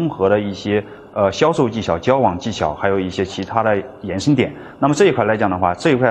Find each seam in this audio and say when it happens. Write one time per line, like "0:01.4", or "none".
none